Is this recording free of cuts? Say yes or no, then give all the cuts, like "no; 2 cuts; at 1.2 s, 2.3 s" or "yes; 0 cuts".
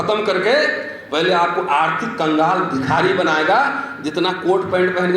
yes; 0 cuts